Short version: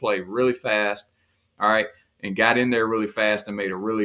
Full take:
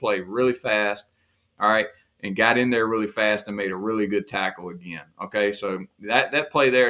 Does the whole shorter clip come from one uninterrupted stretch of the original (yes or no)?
yes